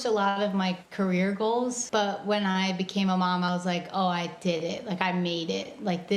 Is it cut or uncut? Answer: cut